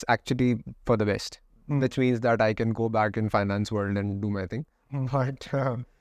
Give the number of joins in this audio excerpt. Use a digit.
0